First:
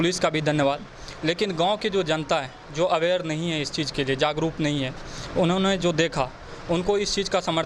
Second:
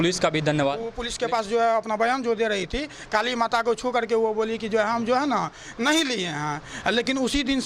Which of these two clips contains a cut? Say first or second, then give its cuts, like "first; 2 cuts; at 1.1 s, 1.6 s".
second; 1 cut; at 1.0 s